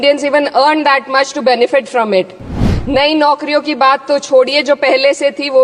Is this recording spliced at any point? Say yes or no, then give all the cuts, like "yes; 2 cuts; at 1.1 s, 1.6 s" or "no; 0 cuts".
yes; 1 cut; at 2.6 s